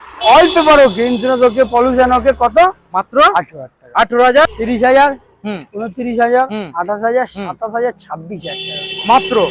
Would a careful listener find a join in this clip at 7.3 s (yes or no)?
no